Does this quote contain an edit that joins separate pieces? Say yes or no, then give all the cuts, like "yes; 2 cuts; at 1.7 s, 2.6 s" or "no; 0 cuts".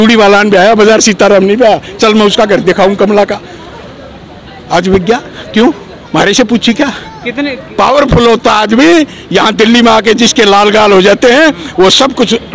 no; 0 cuts